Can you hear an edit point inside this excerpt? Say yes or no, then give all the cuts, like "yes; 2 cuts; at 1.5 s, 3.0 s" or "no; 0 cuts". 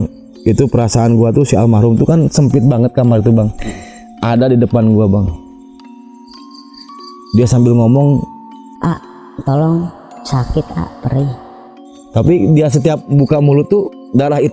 no; 0 cuts